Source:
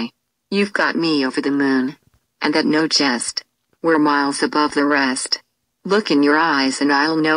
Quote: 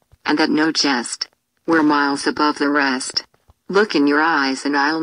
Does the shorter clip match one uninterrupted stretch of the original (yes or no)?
yes